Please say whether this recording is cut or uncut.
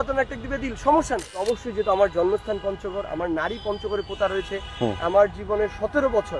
cut